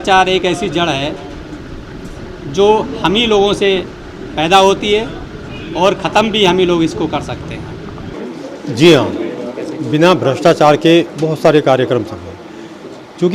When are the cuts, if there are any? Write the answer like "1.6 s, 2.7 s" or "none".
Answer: 8.1 s